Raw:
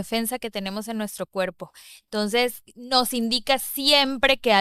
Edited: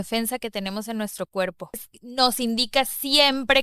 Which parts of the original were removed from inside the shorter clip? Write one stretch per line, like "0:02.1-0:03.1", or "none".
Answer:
0:01.9-0:02.7